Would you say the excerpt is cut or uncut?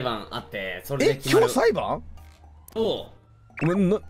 uncut